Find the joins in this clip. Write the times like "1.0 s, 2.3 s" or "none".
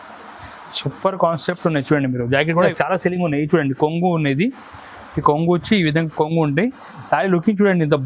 2.7 s